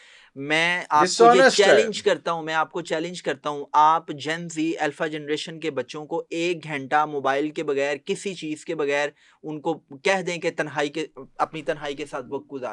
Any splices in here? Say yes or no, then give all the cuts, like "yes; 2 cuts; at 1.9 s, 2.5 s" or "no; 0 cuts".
no; 0 cuts